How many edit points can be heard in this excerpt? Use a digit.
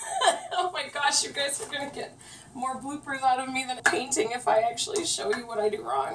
1